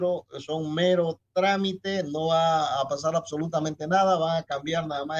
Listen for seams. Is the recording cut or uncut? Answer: uncut